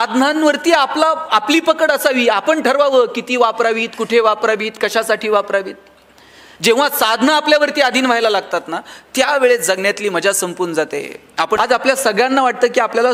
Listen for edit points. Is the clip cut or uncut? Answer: cut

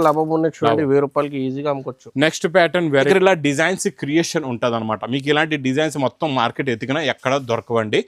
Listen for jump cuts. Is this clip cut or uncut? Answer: cut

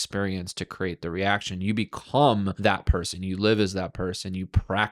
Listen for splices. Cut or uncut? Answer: cut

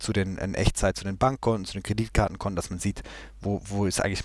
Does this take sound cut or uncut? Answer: uncut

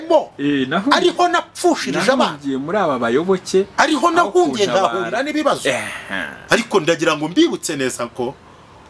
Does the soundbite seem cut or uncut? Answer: uncut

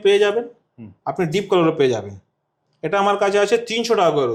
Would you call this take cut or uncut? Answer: uncut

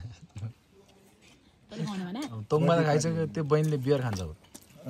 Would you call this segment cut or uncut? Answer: uncut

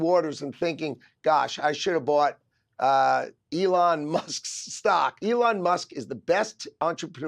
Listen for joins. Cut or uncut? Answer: cut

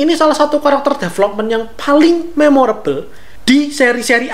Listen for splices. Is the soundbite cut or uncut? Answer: uncut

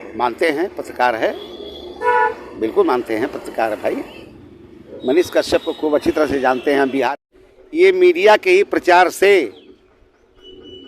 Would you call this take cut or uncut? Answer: cut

